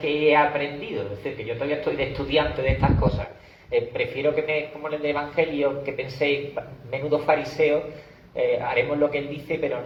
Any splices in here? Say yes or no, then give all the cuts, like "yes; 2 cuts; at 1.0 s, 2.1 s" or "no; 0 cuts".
no; 0 cuts